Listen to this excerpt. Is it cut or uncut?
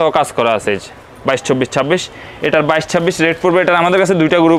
uncut